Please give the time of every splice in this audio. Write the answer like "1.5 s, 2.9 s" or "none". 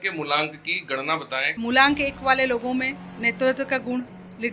1.5 s